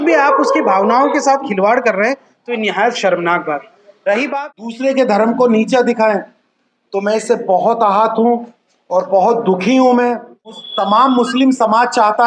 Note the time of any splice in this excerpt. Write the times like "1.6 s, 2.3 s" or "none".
4.1 s, 10.6 s